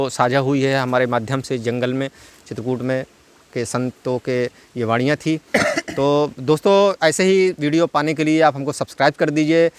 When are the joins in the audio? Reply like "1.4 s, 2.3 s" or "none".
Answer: none

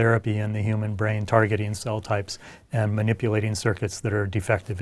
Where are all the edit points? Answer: none

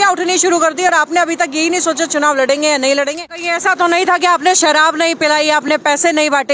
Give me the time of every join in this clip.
3.1 s

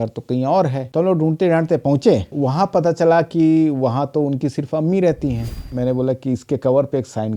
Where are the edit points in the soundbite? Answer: 5.6 s

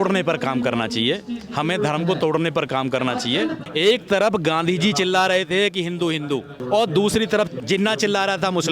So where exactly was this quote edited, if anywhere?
3.6 s, 6.6 s, 7.6 s

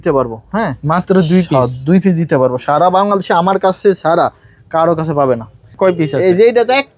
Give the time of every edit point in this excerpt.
5.7 s

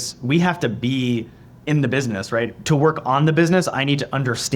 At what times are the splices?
1.7 s

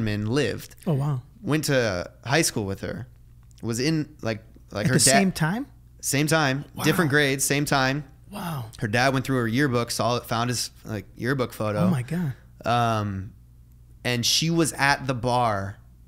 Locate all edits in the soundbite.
none

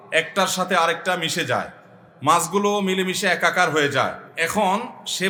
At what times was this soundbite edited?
none

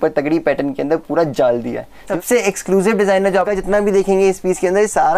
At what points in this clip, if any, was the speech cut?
2.1 s, 3.5 s

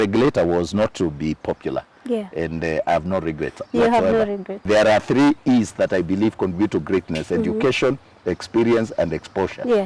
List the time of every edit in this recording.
4.6 s

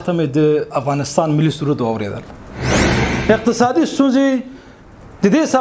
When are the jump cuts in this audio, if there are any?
2.9 s

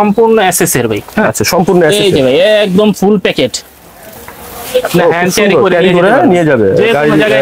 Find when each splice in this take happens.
none

